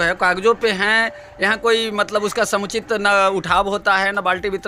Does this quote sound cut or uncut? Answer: uncut